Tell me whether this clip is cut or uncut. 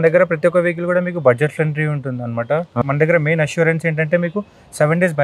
cut